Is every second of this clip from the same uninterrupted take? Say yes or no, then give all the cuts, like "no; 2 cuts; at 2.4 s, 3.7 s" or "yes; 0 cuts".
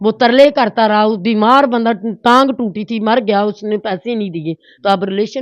yes; 0 cuts